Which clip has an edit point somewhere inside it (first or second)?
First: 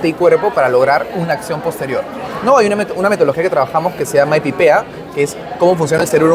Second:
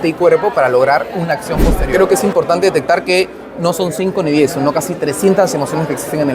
second